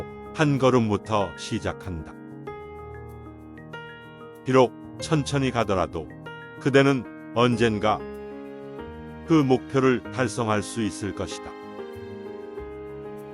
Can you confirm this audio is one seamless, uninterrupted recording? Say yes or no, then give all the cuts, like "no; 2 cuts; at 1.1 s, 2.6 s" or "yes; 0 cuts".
no; 2 cuts; at 2.0 s, 4.4 s